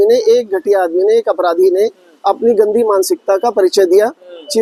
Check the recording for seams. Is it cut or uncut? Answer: uncut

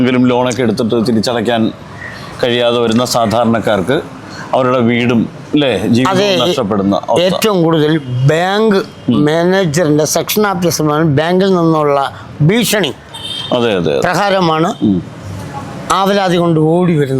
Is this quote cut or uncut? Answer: uncut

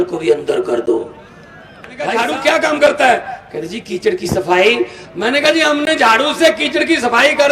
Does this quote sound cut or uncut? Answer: cut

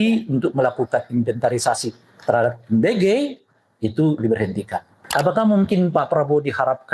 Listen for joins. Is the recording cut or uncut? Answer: cut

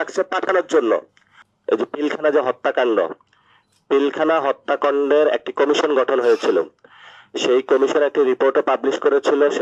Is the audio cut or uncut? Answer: cut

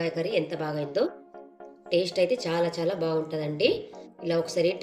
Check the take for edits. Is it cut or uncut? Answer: uncut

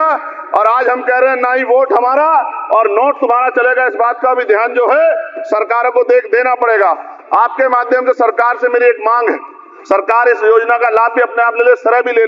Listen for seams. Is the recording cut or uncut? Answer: uncut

